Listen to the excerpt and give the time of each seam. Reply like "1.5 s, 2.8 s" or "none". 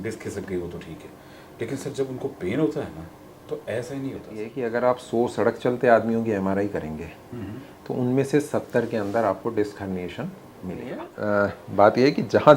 4.5 s, 11.1 s